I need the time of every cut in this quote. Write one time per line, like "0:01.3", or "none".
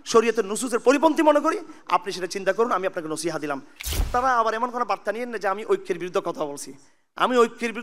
0:04.1